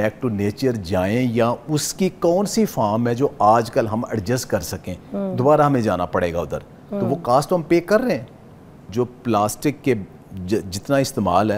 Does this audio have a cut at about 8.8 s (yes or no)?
yes